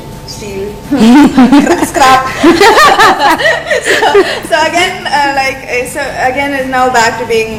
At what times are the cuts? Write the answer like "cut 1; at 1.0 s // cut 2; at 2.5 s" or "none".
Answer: none